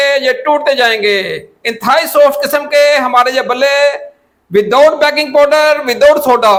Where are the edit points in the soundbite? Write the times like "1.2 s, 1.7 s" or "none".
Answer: none